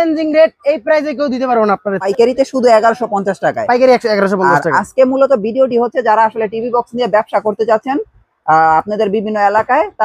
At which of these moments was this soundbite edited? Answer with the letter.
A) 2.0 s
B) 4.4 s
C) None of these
A